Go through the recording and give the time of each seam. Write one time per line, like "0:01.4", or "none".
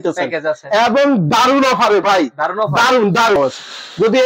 0:03.4

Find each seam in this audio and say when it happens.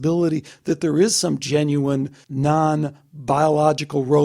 0:02.2

